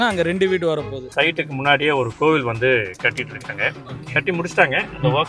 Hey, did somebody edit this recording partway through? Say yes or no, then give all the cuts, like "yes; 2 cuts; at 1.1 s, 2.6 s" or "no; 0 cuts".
yes; 1 cut; at 1.0 s